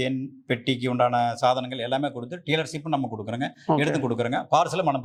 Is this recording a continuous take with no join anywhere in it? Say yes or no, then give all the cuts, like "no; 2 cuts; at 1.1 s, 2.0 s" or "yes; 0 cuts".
yes; 0 cuts